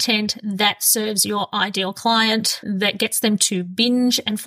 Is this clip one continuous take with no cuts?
yes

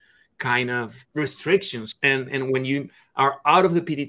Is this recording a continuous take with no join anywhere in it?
no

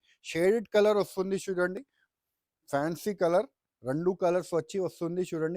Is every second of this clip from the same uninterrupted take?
yes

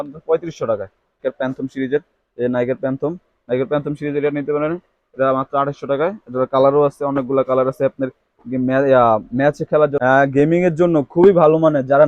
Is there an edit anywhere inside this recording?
yes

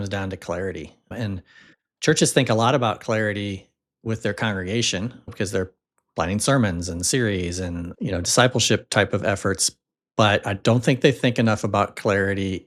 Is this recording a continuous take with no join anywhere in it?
yes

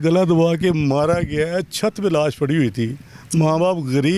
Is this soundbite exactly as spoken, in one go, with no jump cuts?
yes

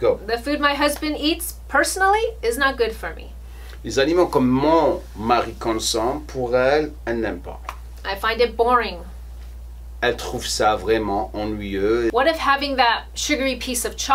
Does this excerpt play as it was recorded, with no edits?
no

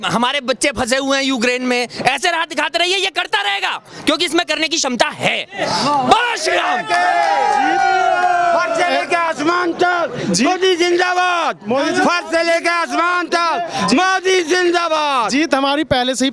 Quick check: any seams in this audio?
no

